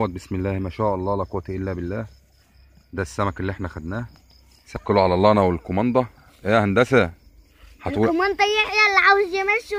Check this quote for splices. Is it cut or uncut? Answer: cut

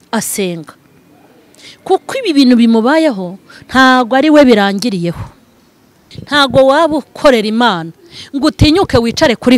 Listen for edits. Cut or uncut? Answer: cut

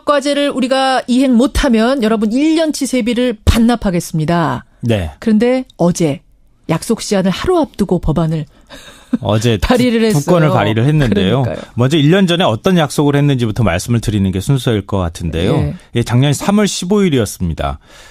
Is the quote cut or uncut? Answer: cut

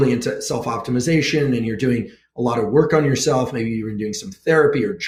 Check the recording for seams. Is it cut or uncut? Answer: uncut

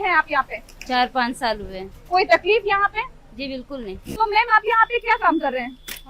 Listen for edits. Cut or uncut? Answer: cut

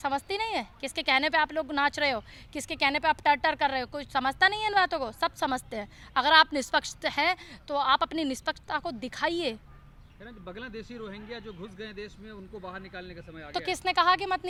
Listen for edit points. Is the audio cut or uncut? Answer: uncut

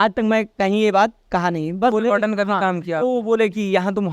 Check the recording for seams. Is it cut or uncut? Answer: cut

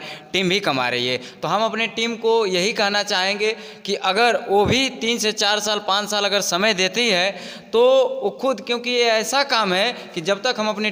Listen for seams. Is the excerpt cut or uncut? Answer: uncut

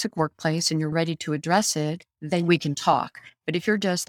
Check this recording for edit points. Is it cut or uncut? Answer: cut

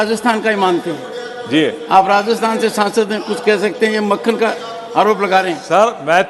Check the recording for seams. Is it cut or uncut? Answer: uncut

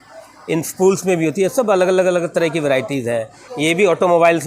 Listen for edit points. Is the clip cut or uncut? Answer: cut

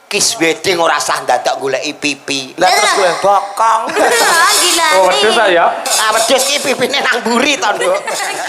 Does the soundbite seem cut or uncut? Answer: uncut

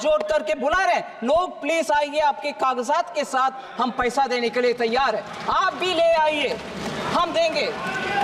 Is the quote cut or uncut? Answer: uncut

